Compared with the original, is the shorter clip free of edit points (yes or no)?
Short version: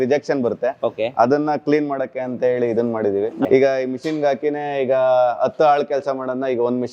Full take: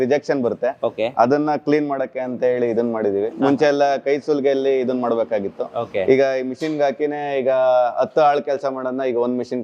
no